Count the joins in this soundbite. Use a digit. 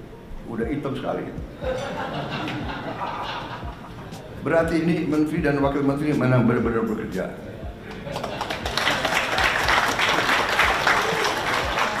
0